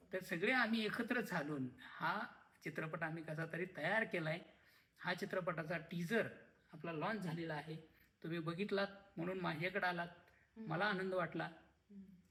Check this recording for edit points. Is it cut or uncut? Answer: uncut